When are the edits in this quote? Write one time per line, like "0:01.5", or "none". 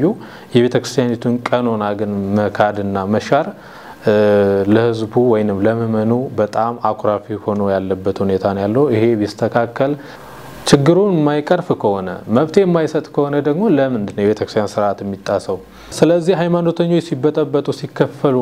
0:10.1
0:15.9